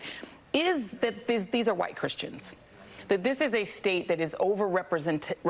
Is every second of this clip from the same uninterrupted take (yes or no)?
yes